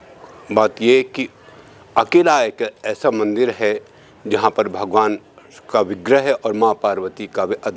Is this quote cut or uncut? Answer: uncut